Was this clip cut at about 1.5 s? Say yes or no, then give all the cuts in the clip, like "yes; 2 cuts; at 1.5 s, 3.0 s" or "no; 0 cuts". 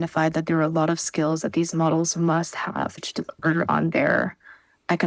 no; 1 cut; at 3.0 s